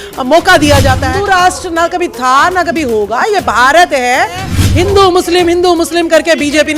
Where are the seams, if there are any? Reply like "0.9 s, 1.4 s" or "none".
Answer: 1.1 s, 4.6 s

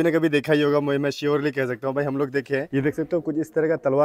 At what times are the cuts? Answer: 2.7 s

